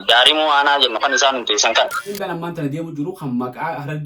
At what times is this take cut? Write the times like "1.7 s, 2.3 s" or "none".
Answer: 2.1 s

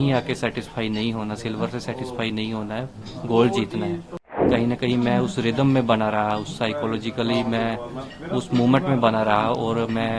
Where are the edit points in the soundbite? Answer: 4.4 s

